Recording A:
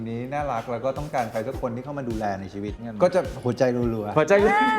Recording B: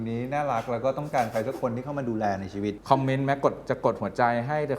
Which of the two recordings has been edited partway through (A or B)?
A